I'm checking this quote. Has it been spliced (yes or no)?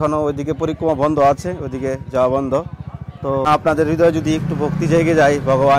yes